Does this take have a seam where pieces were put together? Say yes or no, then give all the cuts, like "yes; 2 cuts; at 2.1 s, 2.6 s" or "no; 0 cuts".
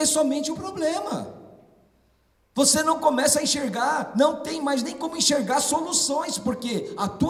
no; 0 cuts